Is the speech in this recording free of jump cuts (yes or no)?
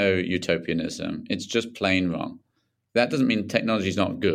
yes